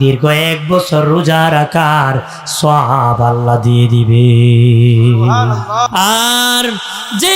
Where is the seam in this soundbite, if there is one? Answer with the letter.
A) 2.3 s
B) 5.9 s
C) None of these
B